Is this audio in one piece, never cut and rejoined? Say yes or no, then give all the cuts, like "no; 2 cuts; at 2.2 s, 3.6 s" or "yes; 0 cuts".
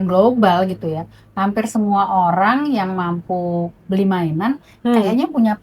yes; 0 cuts